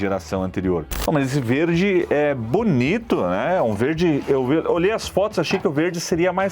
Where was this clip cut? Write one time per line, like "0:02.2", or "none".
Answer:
0:00.9